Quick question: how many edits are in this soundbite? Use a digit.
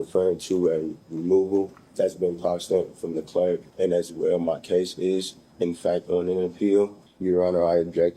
3